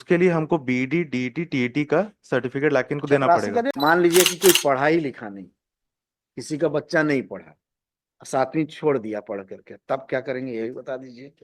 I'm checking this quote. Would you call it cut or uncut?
cut